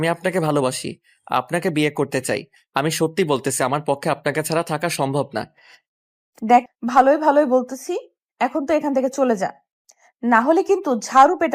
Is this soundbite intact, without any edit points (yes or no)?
no